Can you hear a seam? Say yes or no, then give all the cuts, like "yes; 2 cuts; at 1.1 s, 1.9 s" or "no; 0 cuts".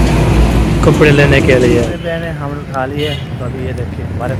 no; 0 cuts